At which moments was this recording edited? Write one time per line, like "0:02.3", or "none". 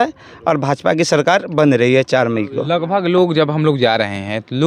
none